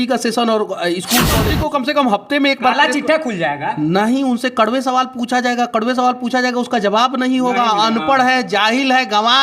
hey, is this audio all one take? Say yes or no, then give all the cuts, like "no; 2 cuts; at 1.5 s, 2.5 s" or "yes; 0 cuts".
no; 1 cut; at 1.5 s